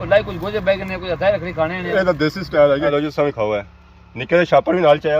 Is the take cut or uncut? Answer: cut